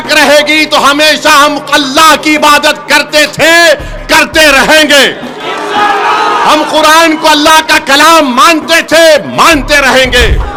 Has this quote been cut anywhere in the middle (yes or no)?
no